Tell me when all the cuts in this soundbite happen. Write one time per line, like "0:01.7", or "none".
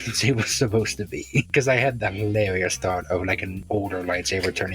0:01.5
0:03.5